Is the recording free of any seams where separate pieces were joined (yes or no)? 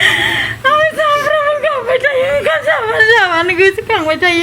yes